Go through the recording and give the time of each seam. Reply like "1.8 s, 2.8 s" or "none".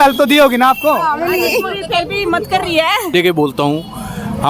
3.1 s